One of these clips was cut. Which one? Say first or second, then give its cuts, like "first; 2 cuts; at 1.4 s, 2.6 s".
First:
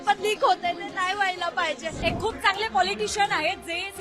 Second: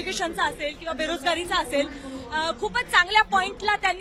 first; 1 cut; at 2.0 s